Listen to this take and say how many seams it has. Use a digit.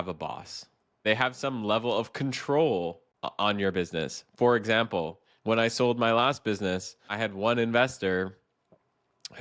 3